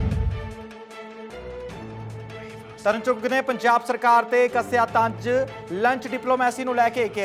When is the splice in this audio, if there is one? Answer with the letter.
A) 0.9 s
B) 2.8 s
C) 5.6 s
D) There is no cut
D